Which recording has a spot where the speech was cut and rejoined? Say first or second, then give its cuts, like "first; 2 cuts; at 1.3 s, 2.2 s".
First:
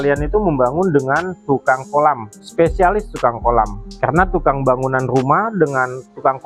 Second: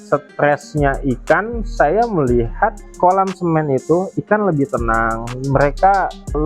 second; 1 cut; at 2.8 s